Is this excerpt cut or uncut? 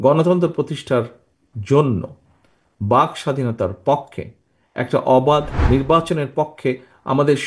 cut